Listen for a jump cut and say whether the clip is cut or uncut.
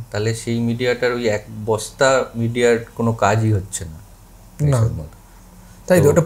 uncut